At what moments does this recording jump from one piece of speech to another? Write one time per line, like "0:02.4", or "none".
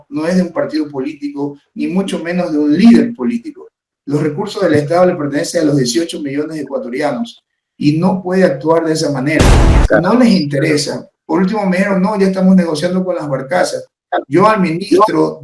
0:09.8